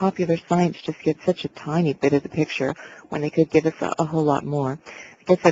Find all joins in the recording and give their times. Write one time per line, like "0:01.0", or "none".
none